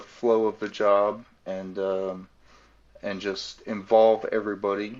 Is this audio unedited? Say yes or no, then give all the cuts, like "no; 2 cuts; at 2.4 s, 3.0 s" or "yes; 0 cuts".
yes; 0 cuts